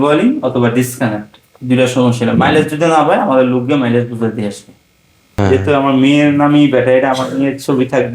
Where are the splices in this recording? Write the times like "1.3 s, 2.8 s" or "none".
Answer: 5.4 s